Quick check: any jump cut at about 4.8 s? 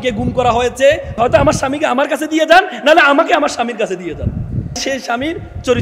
yes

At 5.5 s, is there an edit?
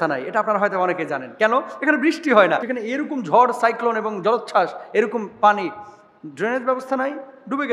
no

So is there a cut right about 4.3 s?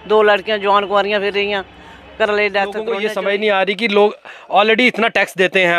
no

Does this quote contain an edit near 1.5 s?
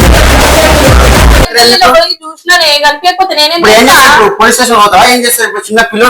yes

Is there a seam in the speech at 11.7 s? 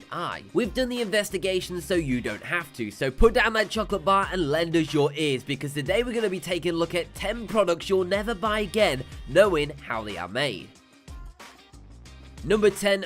yes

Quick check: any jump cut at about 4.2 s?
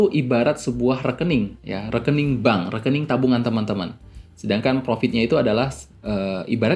no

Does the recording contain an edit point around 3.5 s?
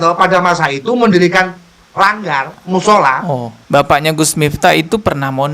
yes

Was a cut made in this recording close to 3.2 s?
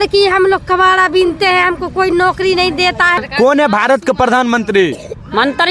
yes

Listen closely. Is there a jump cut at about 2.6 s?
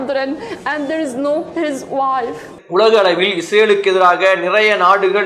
yes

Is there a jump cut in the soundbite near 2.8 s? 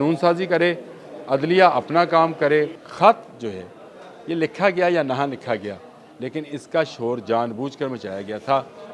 yes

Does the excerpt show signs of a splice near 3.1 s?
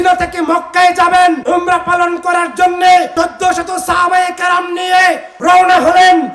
yes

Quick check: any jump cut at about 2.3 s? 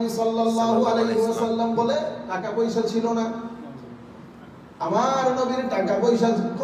yes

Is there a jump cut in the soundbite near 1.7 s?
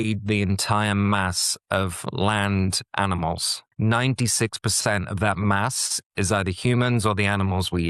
no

